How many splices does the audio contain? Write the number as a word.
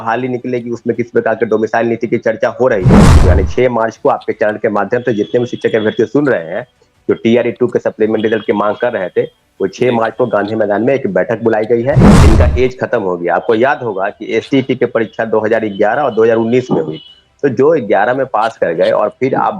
two